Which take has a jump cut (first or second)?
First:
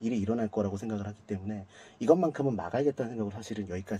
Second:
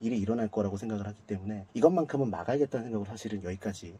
second